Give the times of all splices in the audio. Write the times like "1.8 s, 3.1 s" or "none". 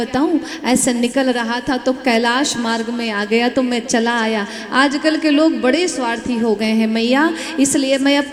none